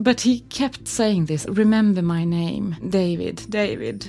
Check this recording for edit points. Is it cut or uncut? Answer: cut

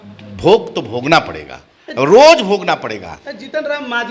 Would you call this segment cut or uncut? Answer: uncut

